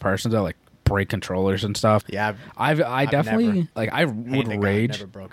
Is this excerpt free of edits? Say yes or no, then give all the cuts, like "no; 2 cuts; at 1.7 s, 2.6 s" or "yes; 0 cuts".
no; 2 cuts; at 2.1 s, 3.7 s